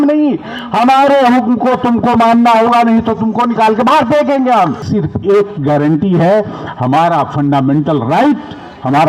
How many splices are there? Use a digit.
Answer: 1